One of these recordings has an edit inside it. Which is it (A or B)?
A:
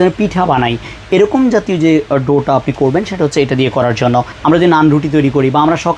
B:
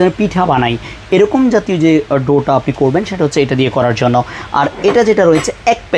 A